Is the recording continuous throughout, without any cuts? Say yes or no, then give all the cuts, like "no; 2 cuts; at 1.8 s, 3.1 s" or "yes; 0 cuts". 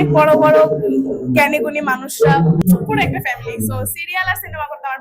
no; 1 cut; at 2.6 s